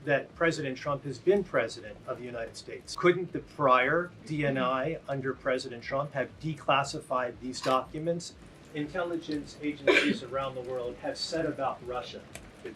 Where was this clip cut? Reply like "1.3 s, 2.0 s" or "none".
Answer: 2.9 s, 8.4 s